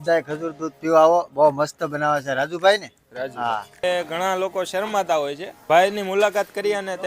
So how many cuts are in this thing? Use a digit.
0